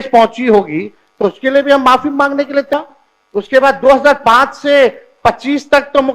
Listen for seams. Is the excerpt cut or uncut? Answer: cut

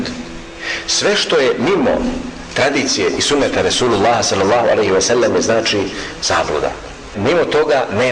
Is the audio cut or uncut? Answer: cut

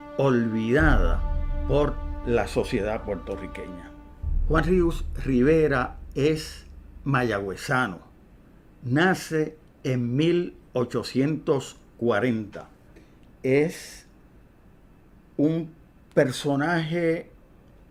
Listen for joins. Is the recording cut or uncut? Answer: uncut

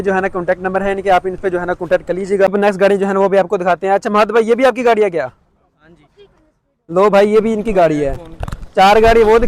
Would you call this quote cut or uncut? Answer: cut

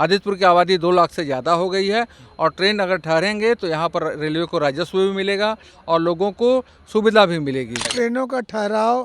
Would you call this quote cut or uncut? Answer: cut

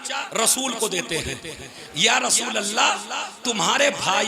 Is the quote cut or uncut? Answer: uncut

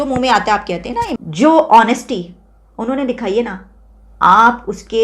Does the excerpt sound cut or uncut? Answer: cut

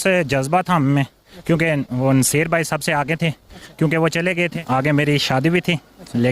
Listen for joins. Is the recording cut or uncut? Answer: cut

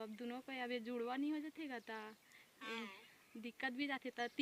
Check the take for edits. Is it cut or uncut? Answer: uncut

